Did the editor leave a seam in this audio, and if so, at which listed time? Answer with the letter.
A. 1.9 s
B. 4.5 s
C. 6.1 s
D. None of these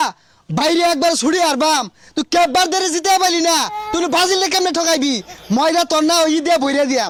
D